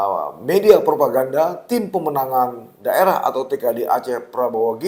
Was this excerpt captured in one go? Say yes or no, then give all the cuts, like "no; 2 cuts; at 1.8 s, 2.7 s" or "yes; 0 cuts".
yes; 0 cuts